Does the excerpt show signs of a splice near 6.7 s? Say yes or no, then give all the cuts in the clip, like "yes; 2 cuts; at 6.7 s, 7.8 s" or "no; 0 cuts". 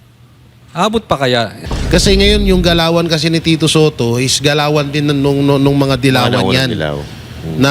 no; 1 cut; at 1.6 s